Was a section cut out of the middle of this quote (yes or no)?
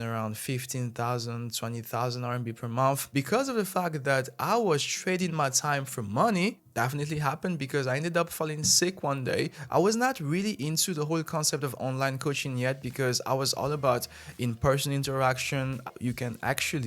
yes